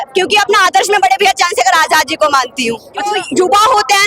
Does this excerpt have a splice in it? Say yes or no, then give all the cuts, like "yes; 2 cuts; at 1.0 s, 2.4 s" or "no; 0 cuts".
yes; 1 cut; at 3.1 s